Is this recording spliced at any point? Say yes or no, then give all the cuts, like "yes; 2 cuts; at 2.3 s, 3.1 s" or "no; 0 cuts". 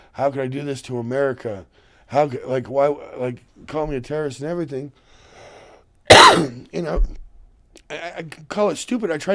no; 0 cuts